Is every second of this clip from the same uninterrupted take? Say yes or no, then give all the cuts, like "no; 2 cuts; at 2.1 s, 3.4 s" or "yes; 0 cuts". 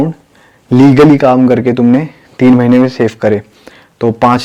yes; 0 cuts